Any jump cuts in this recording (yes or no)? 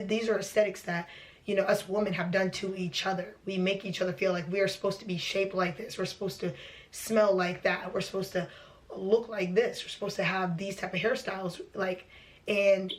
no